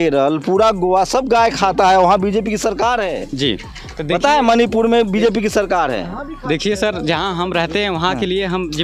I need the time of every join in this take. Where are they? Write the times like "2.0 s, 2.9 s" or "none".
none